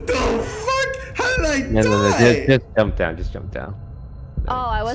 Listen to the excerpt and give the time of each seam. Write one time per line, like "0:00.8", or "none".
none